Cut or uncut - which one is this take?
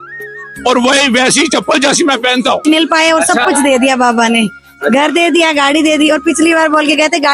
cut